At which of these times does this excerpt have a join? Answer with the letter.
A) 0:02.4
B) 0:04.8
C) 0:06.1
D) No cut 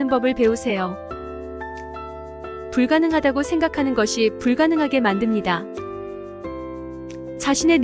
D